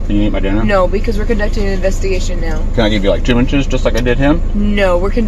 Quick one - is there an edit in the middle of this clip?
no; 0 cuts

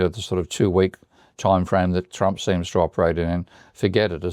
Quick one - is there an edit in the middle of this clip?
no; 0 cuts

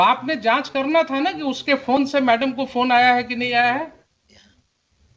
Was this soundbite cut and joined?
no; 0 cuts

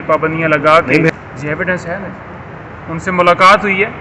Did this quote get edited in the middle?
yes; 1 cut; at 1.1 s

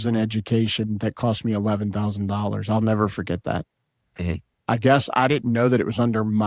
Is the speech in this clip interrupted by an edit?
yes; 1 cut; at 4.5 s

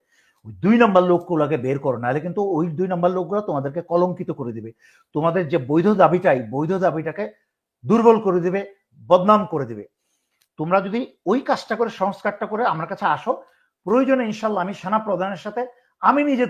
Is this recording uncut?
yes; 0 cuts

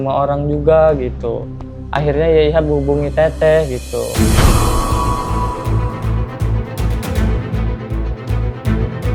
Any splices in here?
no; 0 cuts

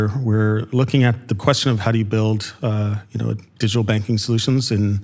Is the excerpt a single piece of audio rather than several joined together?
no; 1 cut; at 1.4 s

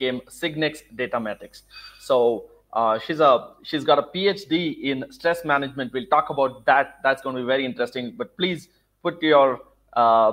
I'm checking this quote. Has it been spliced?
no; 0 cuts

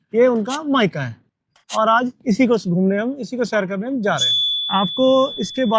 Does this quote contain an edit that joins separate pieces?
no; 0 cuts

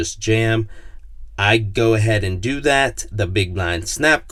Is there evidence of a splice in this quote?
no; 0 cuts

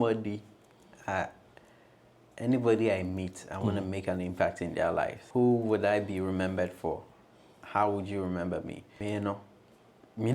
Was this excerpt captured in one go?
no; 2 cuts; at 5.2 s, 8.8 s

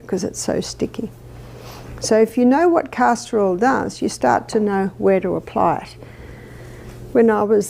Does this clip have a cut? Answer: yes; 2 cuts; at 1.5 s, 6.8 s

